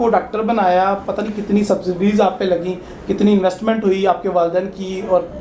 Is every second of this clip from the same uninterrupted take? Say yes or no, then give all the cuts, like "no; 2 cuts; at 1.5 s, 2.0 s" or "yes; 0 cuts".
yes; 0 cuts